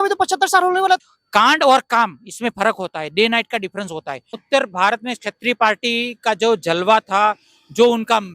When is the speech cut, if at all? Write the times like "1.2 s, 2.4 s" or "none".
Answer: 1.1 s, 4.3 s